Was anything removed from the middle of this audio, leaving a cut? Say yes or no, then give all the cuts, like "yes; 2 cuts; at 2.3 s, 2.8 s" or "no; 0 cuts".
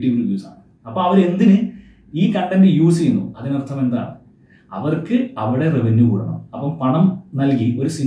no; 0 cuts